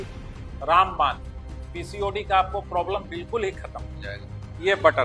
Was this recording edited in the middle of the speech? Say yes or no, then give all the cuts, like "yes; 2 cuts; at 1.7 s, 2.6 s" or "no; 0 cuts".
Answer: no; 0 cuts